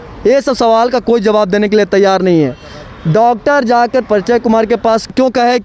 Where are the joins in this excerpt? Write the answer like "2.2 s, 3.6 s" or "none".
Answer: none

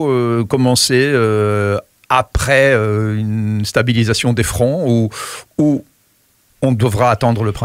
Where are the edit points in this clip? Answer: none

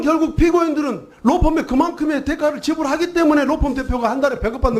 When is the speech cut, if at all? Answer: 3.4 s

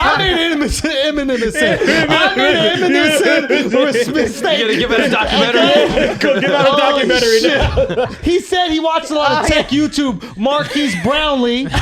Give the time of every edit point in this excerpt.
8.1 s

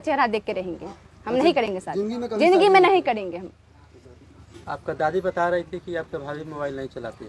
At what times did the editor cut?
none

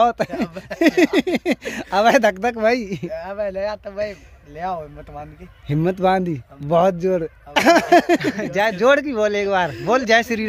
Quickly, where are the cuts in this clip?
8.4 s

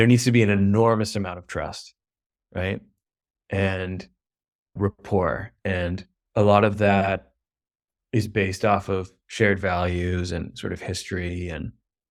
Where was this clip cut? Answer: none

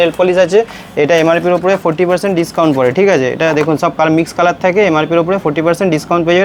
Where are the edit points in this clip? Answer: none

